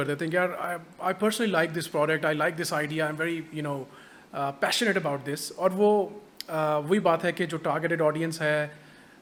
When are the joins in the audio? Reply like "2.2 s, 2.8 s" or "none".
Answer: none